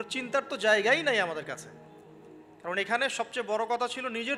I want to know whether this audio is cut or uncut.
uncut